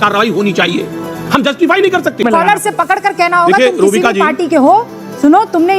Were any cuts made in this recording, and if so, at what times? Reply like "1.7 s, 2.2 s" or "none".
2.2 s

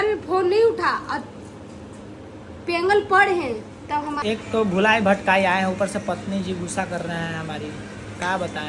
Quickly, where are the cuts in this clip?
4.2 s

